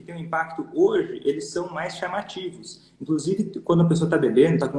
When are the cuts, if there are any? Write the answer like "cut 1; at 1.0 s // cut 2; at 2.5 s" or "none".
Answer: none